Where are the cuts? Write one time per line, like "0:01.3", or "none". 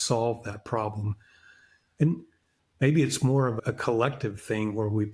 0:03.6